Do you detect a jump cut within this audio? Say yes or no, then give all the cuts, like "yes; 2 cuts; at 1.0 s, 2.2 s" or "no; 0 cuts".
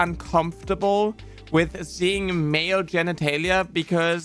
no; 0 cuts